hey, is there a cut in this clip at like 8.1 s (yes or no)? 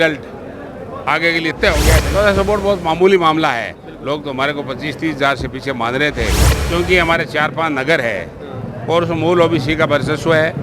no